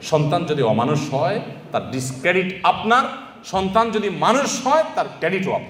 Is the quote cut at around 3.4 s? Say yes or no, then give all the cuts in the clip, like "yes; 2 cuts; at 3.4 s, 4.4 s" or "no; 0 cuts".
no; 0 cuts